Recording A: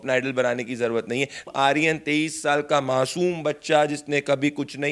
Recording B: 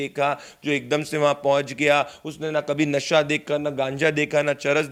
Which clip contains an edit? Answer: A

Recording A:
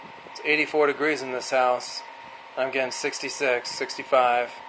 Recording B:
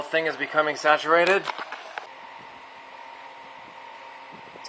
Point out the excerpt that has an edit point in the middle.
B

